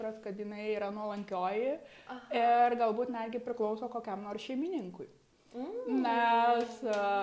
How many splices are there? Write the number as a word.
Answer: zero